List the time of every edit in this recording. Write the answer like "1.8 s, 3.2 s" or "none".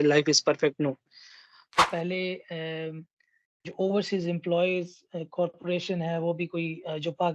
1.8 s

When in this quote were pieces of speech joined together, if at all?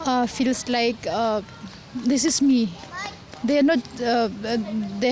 none

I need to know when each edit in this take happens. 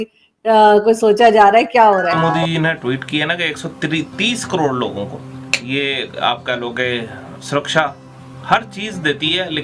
2.1 s

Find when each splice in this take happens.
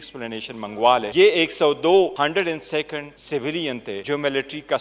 1.1 s, 2.1 s, 3.1 s, 4.0 s

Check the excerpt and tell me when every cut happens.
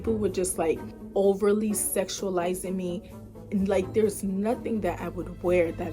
0.9 s

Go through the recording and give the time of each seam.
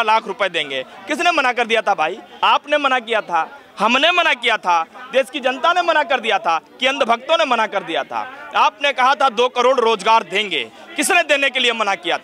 none

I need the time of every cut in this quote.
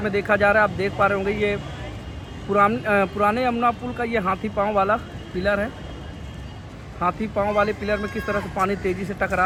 none

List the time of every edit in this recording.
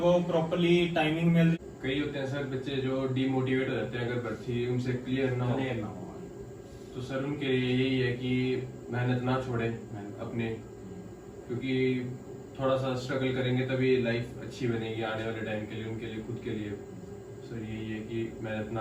1.6 s

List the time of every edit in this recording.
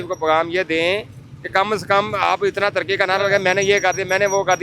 none

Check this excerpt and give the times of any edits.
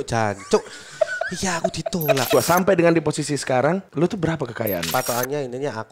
2.3 s, 3.9 s, 4.9 s

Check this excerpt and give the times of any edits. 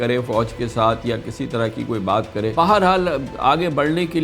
2.5 s

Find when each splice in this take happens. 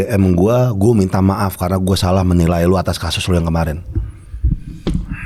none

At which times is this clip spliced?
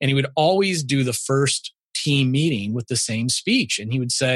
none

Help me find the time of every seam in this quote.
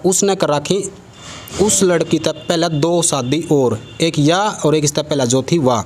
none

